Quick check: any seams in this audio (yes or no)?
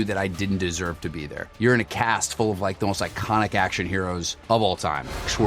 yes